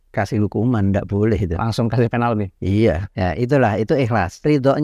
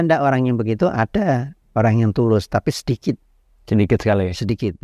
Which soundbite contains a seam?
first; 1 cut; at 3.1 s

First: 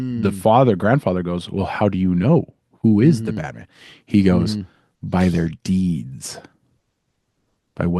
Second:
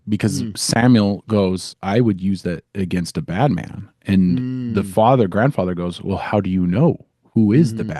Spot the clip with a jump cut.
second; 1 cut; at 1.7 s

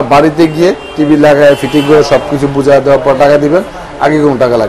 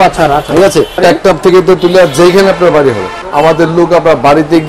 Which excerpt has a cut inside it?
second; 2 cuts; at 1.0 s, 3.2 s

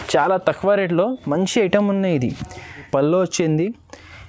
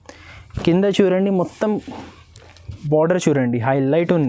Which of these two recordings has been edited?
first; 1 cut; at 2.8 s

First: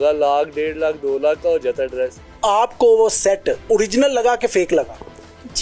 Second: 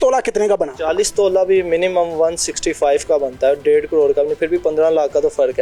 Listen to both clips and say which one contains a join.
first; 2 cuts; at 2.2 s, 3.7 s

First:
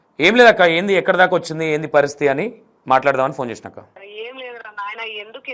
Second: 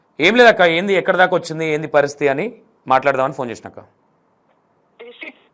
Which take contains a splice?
first; 1 cut; at 4.0 s

